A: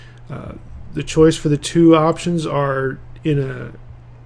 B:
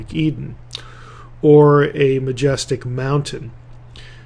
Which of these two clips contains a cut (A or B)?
A